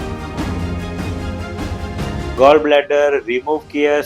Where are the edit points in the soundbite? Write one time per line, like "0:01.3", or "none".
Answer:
0:02.3

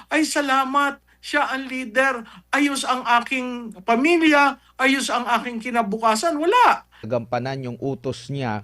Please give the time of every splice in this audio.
0:07.0

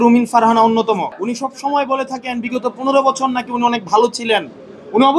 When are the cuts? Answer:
0:01.1

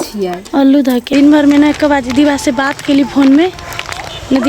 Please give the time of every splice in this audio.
0:01.1

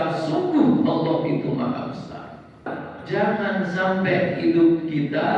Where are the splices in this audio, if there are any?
0:02.7

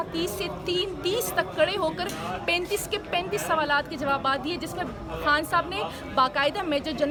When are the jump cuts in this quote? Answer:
none

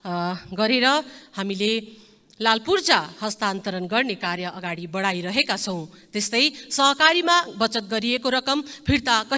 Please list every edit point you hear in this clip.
none

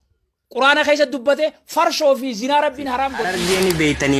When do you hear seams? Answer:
0:03.2

